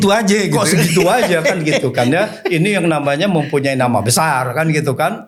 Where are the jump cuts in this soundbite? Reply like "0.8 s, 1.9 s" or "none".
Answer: none